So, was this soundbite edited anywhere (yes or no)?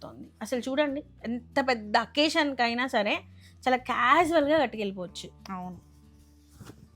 no